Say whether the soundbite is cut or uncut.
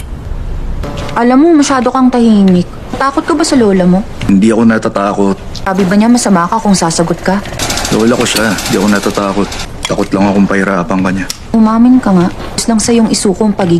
cut